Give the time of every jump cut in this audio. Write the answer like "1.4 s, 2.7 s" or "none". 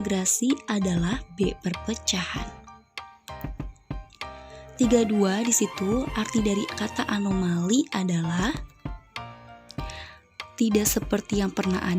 2.3 s, 4.8 s, 8.5 s, 10.5 s